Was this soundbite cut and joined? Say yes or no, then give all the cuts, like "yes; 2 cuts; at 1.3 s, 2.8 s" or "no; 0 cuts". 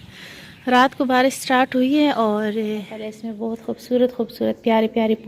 yes; 1 cut; at 3.3 s